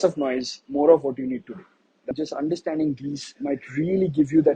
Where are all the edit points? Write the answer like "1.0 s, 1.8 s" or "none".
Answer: 2.1 s